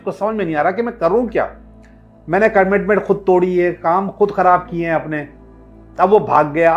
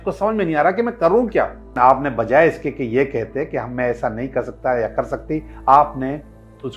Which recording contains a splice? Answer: second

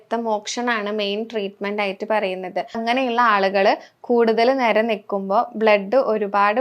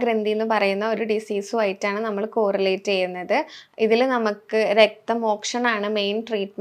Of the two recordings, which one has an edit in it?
first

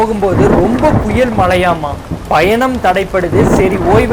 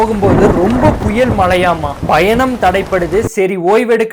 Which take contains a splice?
second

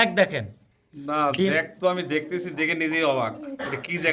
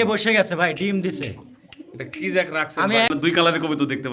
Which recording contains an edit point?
second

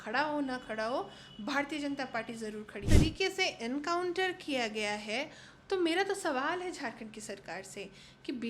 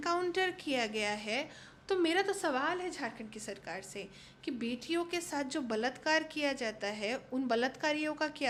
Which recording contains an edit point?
first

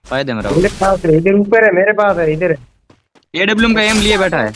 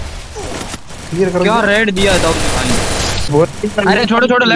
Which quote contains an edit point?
second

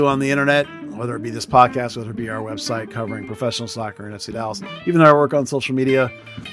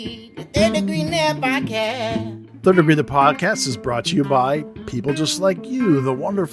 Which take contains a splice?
second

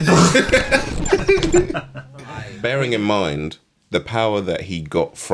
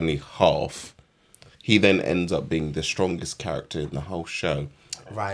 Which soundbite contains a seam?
first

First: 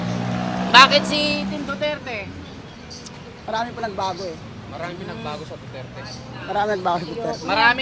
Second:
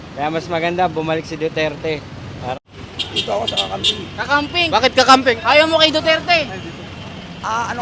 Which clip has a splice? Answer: second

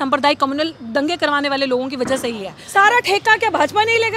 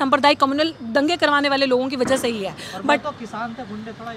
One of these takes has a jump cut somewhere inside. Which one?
first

